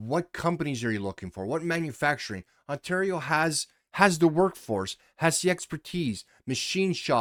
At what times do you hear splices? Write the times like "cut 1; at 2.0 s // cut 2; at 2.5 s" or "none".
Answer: none